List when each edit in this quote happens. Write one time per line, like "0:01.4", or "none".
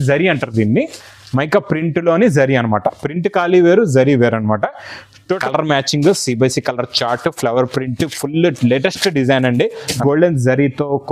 0:05.4
0:10.0